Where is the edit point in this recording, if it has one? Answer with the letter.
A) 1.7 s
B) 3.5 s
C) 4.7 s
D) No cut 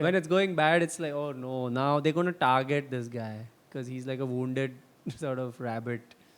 D